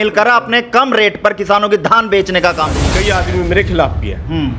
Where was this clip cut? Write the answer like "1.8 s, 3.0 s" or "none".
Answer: 2.9 s